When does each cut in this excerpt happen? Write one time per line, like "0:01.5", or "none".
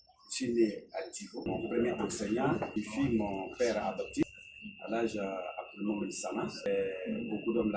0:01.5
0:02.7
0:04.2
0:06.7